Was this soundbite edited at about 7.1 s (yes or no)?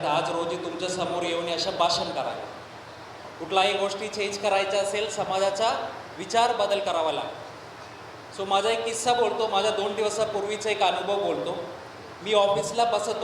no